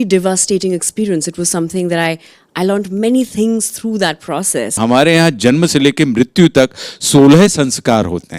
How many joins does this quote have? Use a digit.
1